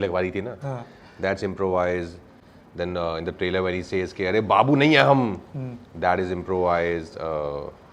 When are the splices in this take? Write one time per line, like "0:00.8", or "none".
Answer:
none